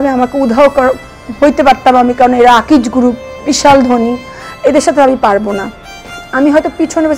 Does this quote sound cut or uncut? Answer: uncut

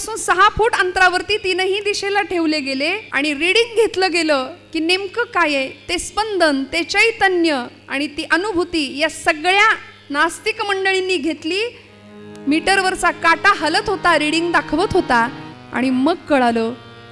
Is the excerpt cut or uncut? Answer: cut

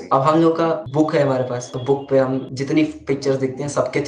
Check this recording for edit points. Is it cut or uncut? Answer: cut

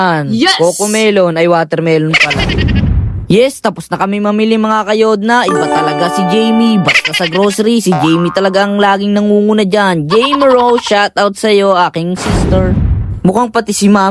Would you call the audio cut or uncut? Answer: uncut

